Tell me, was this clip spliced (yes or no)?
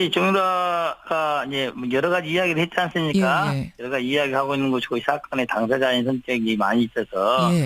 yes